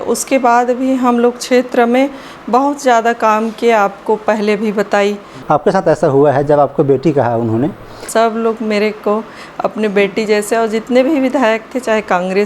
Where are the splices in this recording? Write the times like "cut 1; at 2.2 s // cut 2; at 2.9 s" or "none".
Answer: cut 1; at 5.3 s // cut 2; at 8.0 s